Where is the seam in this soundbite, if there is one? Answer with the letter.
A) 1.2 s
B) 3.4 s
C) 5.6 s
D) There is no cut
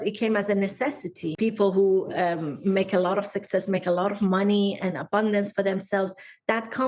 A